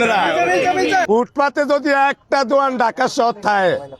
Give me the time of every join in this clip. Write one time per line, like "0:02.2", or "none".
0:01.1